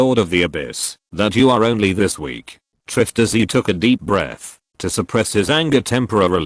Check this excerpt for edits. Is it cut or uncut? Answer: cut